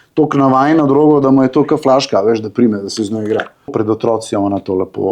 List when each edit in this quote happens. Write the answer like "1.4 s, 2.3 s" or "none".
3.7 s

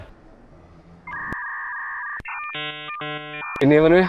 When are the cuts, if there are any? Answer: none

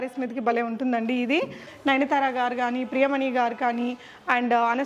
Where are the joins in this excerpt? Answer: 1.7 s

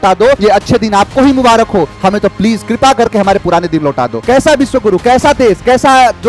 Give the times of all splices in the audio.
4.2 s

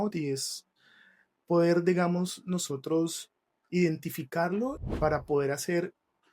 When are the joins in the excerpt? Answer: 4.8 s

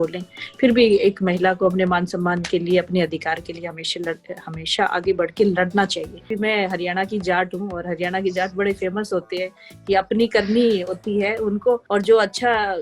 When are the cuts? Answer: 6.3 s, 11.8 s

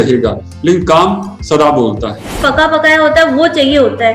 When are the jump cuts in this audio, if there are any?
2.4 s

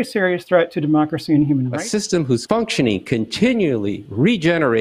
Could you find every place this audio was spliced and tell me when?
1.8 s

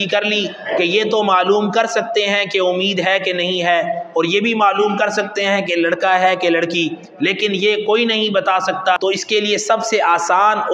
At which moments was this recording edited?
9.0 s

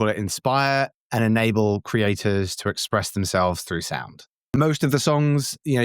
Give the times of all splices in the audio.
4.5 s

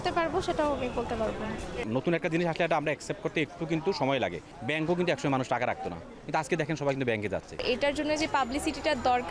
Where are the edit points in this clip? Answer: 1.8 s, 4.5 s, 7.6 s

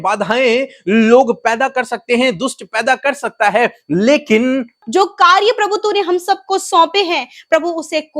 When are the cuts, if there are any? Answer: 4.8 s

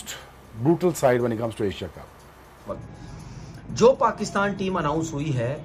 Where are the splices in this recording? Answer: 2.6 s

